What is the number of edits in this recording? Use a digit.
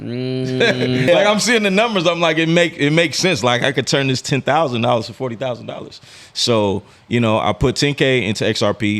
1